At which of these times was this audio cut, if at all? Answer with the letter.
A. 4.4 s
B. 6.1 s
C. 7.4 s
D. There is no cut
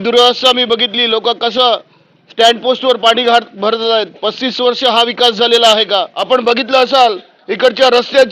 B